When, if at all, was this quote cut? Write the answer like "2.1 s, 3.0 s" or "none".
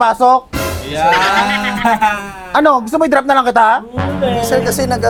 none